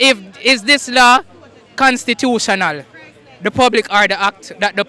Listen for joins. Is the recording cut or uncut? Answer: uncut